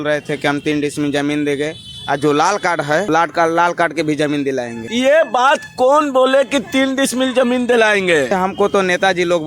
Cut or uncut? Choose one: uncut